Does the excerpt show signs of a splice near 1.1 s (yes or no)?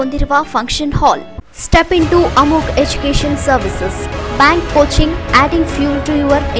yes